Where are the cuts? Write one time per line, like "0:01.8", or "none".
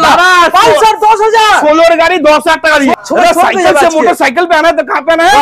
0:02.9